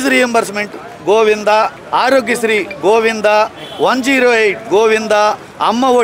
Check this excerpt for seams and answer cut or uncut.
uncut